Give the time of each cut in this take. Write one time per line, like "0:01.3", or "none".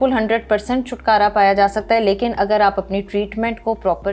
none